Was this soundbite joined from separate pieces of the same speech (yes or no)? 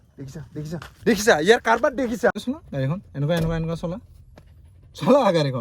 yes